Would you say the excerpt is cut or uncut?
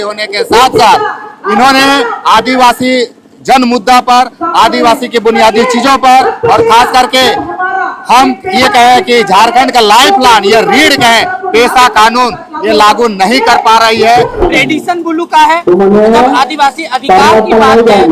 cut